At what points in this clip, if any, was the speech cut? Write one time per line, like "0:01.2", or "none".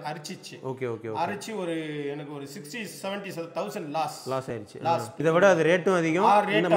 0:05.2

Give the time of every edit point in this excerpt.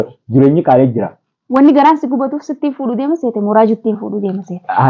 0:01.4

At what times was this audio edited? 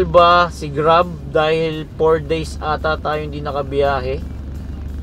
none

